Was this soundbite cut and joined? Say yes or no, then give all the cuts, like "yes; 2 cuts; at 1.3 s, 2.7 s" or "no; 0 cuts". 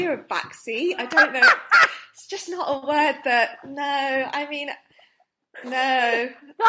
no; 0 cuts